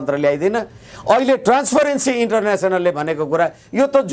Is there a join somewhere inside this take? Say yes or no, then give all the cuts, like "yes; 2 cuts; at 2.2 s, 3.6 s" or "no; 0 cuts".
no; 0 cuts